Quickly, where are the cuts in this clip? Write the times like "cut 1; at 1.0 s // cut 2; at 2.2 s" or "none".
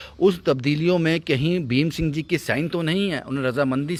none

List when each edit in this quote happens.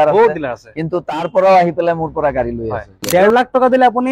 cut 1; at 3.0 s

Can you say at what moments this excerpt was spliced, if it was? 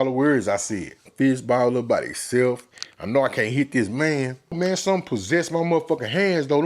cut 1; at 1.0 s // cut 2; at 4.5 s

